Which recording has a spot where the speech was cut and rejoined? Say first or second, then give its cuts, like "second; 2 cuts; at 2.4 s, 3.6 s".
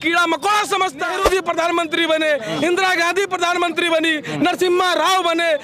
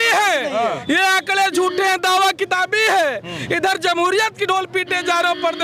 first; 1 cut; at 1.1 s